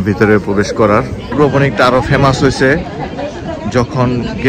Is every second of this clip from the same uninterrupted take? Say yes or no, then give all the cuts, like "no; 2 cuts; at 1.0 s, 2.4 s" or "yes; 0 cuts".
no; 1 cut; at 1.3 s